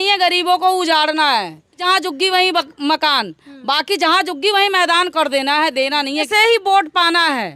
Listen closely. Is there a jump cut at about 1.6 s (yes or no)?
yes